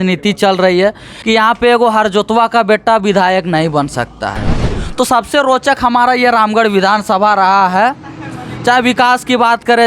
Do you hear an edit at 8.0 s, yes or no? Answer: no